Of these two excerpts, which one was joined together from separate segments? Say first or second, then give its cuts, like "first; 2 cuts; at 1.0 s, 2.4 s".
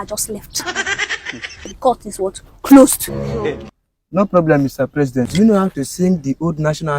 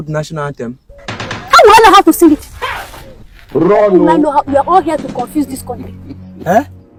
first; 1 cut; at 5.2 s